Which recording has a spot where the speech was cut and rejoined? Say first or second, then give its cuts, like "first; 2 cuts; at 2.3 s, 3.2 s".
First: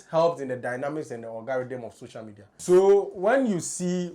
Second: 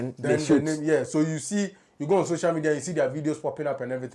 first; 1 cut; at 2.6 s